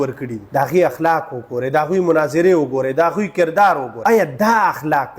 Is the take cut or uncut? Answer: cut